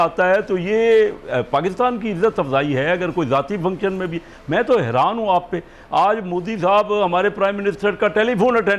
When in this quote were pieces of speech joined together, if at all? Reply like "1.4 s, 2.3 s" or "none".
none